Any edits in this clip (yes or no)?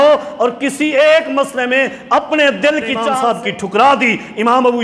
yes